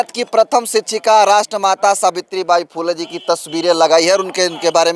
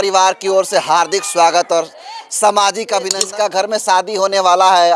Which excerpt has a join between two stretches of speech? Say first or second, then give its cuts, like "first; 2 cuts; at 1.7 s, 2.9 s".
second; 1 cut; at 3.2 s